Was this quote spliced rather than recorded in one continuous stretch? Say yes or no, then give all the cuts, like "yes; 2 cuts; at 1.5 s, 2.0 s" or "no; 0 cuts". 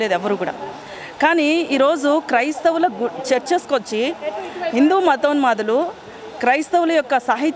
no; 0 cuts